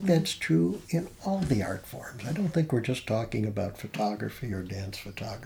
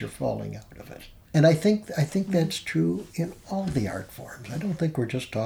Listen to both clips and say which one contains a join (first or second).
second